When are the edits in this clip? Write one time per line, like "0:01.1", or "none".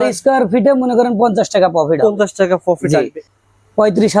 0:03.2